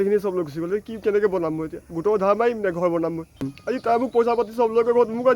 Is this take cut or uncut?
cut